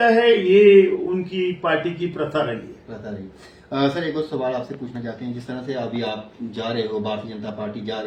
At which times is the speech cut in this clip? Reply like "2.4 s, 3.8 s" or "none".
none